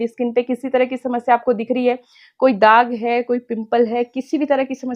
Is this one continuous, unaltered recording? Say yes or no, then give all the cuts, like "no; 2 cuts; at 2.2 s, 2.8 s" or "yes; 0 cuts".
yes; 0 cuts